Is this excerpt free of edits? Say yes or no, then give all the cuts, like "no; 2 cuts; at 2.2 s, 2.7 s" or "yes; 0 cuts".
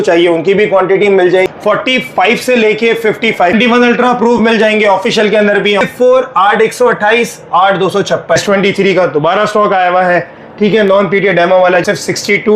no; 5 cuts; at 1.5 s, 3.5 s, 5.8 s, 8.4 s, 11.8 s